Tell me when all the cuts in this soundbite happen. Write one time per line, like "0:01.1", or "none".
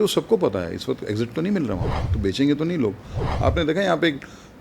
0:02.0
0:03.3